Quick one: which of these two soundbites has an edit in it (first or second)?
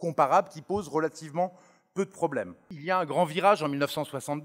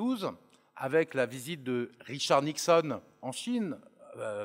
first